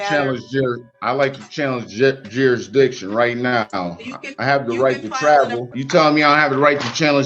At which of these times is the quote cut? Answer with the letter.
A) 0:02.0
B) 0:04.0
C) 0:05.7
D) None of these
C